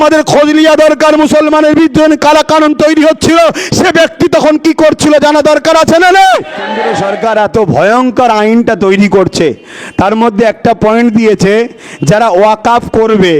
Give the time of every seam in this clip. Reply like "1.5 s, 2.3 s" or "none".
6.8 s